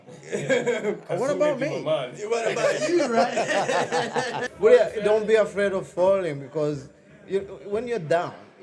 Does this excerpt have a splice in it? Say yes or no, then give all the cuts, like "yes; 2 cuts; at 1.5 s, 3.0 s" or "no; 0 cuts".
yes; 1 cut; at 4.5 s